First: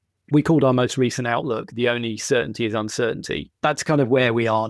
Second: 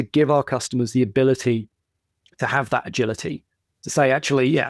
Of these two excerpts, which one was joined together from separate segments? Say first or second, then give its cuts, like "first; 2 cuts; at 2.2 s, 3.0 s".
first; 1 cut; at 3.5 s